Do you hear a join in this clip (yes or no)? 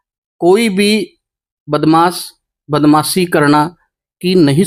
no